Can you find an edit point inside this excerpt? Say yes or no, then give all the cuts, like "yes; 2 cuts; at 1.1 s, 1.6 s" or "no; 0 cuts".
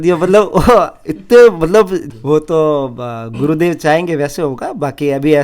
yes; 1 cut; at 2.1 s